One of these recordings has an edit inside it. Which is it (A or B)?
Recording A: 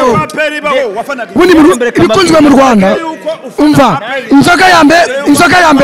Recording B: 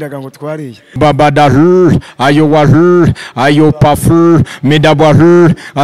B